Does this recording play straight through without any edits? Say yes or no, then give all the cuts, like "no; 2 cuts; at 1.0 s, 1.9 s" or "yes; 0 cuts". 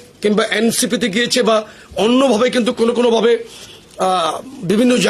yes; 0 cuts